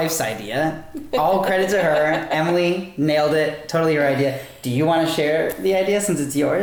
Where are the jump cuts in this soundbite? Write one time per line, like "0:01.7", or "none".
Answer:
none